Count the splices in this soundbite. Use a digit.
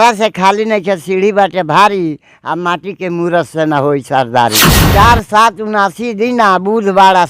1